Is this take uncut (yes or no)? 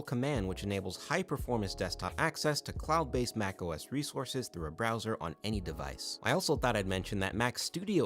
yes